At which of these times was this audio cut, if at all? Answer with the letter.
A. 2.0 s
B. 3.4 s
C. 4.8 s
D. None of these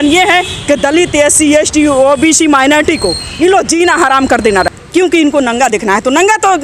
C